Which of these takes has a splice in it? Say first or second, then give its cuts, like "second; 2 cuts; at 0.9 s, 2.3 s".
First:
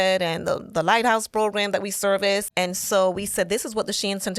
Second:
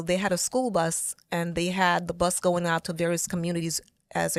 first; 1 cut; at 2.5 s